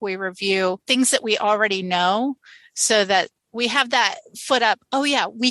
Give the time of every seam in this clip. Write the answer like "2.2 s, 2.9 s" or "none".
3.5 s